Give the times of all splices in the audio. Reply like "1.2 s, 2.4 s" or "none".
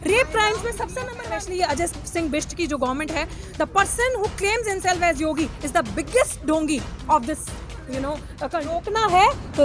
1.2 s, 8.9 s